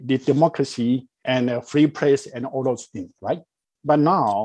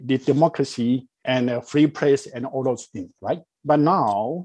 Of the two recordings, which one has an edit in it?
second; 1 cut; at 3.5 s

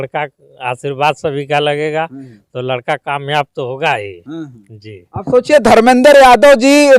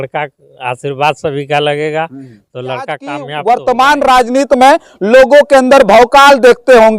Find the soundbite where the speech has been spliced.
second; 1 cut; at 3.3 s

